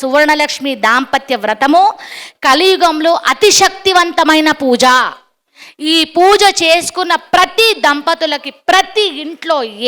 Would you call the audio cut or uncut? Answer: uncut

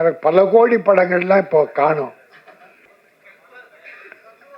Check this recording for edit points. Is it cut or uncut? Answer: cut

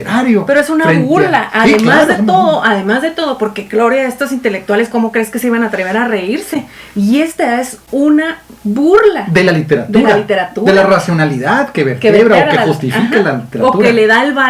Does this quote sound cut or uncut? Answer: uncut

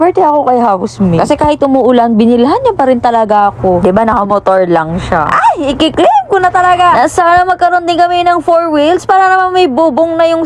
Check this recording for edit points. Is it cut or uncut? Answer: uncut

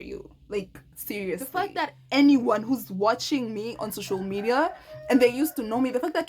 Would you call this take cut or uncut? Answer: cut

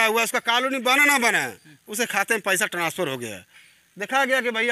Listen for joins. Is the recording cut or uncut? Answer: uncut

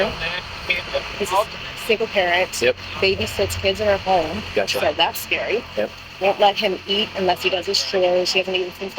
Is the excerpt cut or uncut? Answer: cut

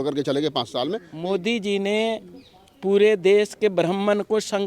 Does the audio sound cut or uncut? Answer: cut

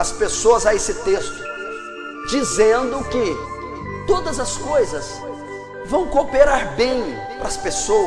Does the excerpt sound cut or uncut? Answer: uncut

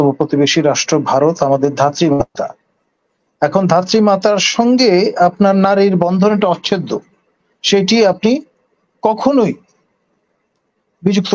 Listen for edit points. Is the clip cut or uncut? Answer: uncut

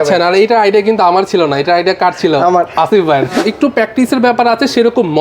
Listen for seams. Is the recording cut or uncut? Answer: cut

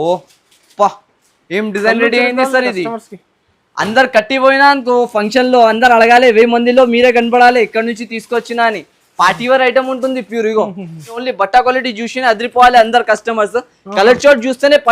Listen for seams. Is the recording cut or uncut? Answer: cut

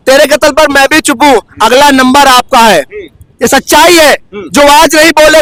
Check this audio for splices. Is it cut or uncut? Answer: uncut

